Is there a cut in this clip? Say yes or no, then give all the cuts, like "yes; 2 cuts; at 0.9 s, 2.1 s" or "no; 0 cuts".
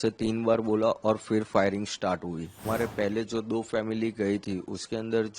yes; 1 cut; at 2.6 s